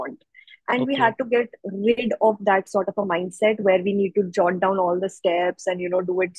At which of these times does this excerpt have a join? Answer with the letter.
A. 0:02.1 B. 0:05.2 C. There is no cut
C